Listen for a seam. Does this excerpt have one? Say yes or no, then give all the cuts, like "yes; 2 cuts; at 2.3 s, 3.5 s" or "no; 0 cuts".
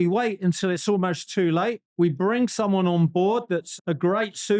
yes; 1 cut; at 3.7 s